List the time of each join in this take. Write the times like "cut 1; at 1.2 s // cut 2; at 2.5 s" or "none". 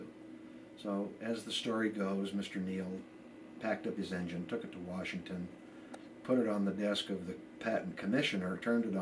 cut 1; at 7.9 s

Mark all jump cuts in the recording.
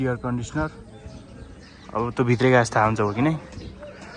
none

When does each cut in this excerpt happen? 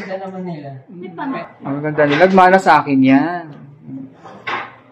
cut 1; at 1.4 s

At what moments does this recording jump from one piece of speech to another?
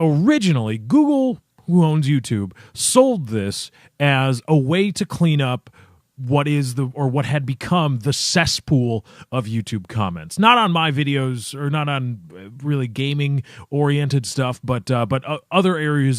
cut 1; at 4.7 s

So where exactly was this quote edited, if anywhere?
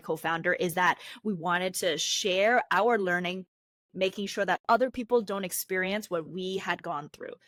none

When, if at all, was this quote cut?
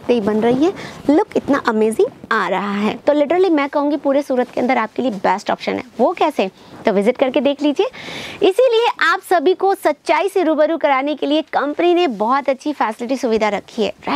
cut 1; at 3.0 s

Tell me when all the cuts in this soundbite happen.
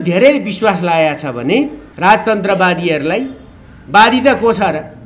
cut 1; at 1.8 s

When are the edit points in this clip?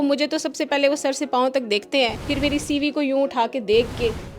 cut 1; at 2.2 s

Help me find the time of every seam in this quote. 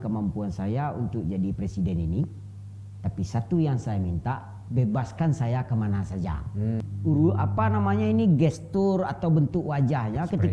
cut 1; at 6.9 s

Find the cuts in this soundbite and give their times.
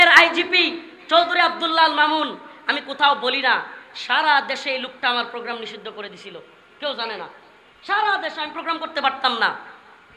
none

